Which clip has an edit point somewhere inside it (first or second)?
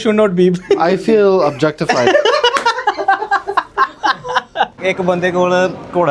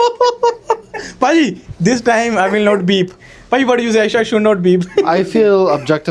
first